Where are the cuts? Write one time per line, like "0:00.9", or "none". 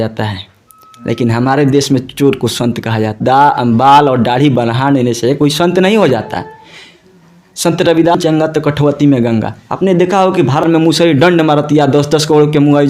0:03.2
0:08.2
0:10.6